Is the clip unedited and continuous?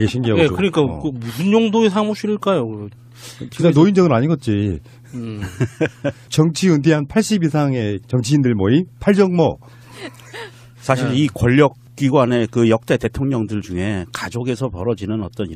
yes; 0 cuts

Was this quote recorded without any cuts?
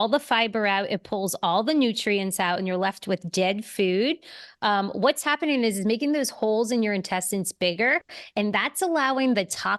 yes; 0 cuts

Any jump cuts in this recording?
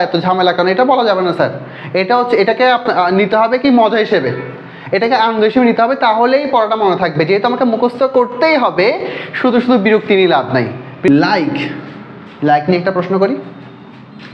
yes; 1 cut; at 11.1 s

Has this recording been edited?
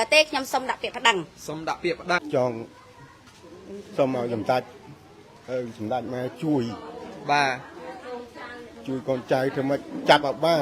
yes; 1 cut; at 2.2 s

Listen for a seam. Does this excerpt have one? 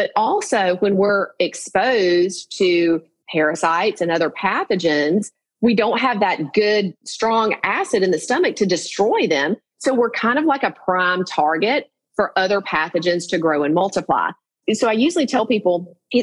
yes; 1 cut; at 14.5 s

